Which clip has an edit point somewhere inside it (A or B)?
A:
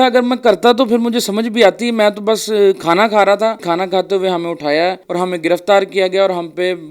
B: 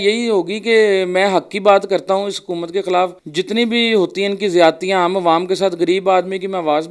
A